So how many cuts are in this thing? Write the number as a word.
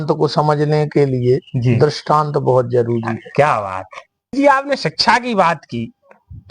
one